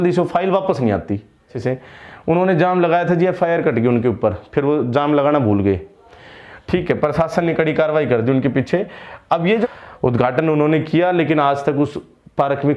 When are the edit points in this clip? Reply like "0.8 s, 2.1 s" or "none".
1.5 s, 9.7 s